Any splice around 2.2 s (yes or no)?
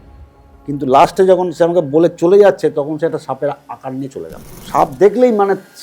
no